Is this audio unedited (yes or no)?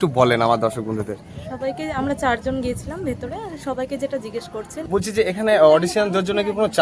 no